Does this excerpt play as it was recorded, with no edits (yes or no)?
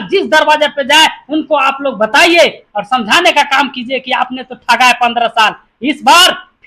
yes